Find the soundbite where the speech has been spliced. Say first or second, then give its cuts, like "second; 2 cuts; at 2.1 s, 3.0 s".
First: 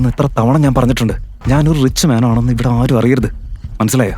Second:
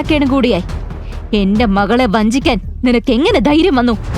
first; 1 cut; at 1.3 s